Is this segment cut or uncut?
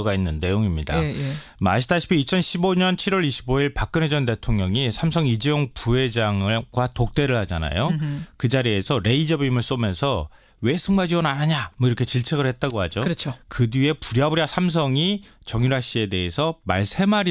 cut